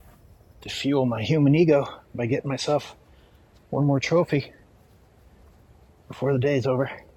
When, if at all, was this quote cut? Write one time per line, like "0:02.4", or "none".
none